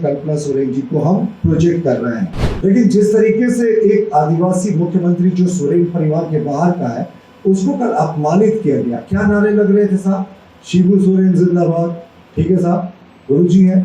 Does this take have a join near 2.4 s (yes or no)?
yes